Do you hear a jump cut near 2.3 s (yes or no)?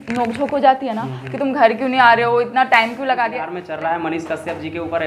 no